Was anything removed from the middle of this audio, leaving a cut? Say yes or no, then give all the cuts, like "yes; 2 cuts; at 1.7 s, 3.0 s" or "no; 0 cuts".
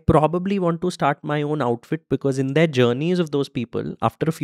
no; 0 cuts